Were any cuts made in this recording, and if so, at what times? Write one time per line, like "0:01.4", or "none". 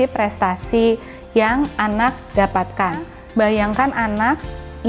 0:03.2